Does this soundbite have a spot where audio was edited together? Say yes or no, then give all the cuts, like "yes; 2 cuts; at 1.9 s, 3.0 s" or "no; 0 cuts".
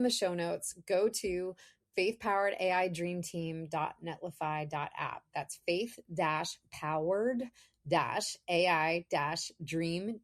no; 0 cuts